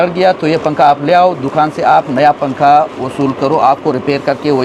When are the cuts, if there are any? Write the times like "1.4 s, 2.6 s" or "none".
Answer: none